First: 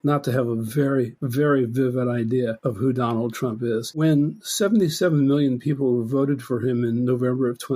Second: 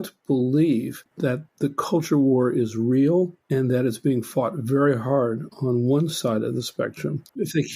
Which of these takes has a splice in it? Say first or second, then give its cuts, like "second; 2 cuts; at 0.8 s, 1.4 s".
first; 3 cuts; at 1.2 s, 2.6 s, 4.0 s